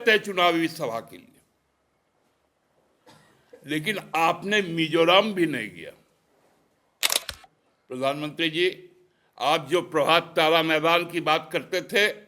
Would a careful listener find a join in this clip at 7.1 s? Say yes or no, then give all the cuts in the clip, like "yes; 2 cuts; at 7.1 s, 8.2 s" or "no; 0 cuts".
yes; 1 cut; at 7.1 s